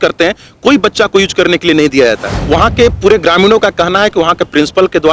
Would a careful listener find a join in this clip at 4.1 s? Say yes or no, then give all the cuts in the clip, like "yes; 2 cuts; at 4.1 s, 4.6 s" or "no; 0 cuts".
no; 1 cut; at 2.3 s